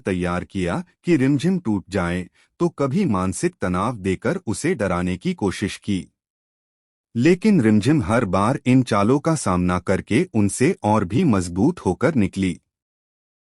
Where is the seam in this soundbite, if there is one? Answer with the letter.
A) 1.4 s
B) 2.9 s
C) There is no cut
A